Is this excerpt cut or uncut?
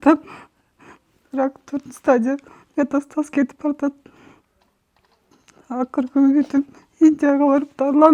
uncut